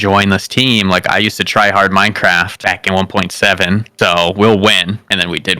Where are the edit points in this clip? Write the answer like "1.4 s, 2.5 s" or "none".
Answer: none

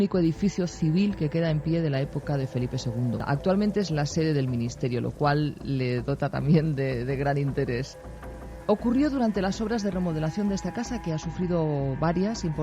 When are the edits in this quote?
3.2 s, 7.9 s

